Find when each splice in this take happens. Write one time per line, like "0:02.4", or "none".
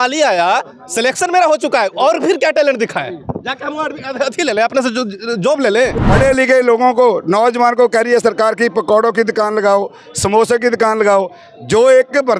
0:06.0